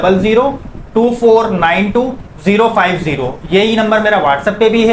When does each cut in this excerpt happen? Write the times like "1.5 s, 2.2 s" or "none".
none